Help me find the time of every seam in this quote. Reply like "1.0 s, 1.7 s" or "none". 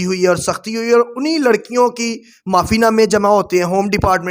none